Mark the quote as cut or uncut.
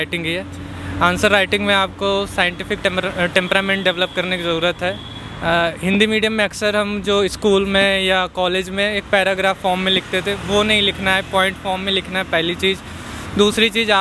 uncut